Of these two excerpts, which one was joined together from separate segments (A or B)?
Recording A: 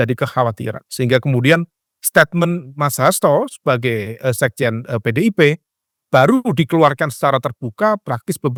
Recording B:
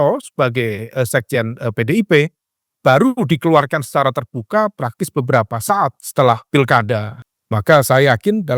B